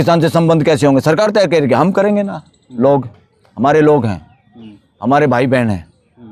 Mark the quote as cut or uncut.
uncut